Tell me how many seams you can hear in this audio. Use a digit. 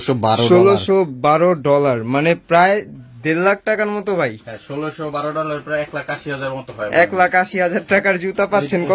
0